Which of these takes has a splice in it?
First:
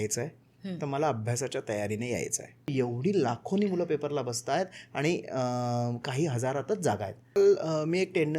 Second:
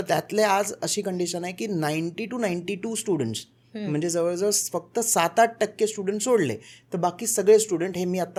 first; 2 cuts; at 2.7 s, 7.4 s

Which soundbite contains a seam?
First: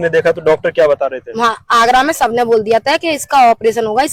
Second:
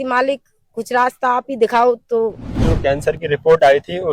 second; 1 cut; at 2.7 s

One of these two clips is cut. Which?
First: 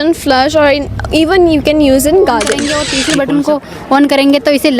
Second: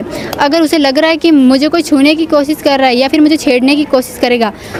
first; 1 cut; at 2.7 s

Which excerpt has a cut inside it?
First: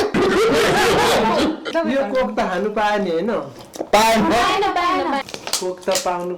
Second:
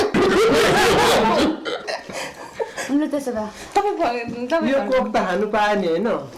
first; 2 cuts; at 1.7 s, 5.3 s

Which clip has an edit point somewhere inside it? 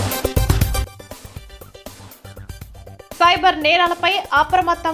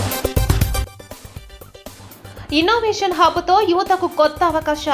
second; 1 cut; at 2.1 s

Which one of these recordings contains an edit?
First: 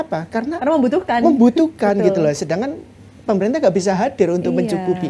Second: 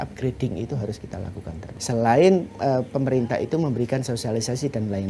second; 1 cut; at 1.7 s

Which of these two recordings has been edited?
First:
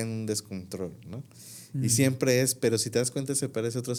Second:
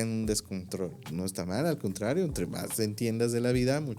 second; 1 cut; at 1.0 s

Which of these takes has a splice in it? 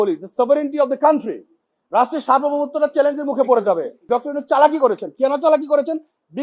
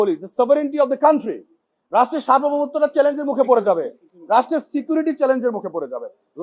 first; 1 cut; at 4.0 s

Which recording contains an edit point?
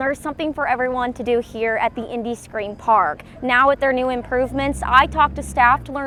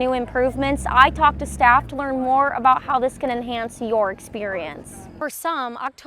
second; 1 cut; at 5.1 s

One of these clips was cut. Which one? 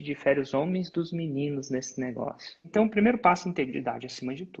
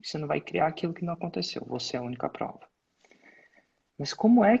first; 1 cut; at 2.6 s

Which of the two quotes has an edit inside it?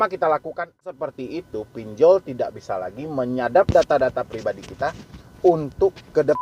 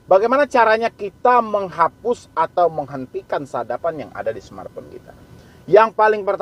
first; 1 cut; at 0.9 s

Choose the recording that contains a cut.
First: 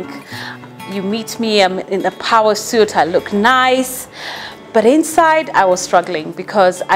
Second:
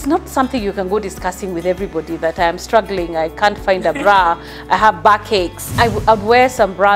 second; 1 cut; at 5.6 s

